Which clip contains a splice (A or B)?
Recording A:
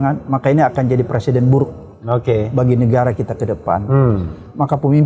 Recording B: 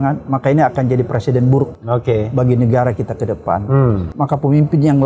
B